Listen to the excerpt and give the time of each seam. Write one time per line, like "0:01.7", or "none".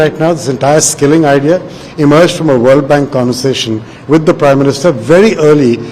none